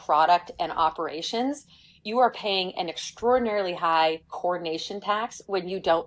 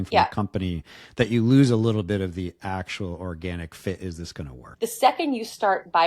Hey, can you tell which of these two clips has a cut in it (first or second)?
second